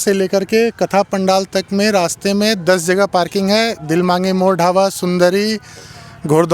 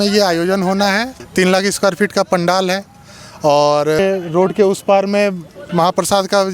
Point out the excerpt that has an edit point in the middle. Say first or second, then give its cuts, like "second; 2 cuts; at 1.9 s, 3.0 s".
second; 2 cuts; at 1.2 s, 4.0 s